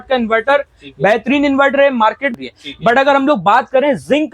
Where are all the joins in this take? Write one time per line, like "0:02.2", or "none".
0:02.3